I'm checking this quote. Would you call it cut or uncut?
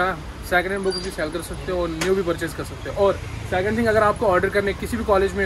uncut